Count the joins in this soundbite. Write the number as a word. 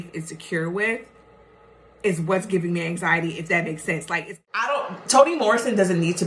one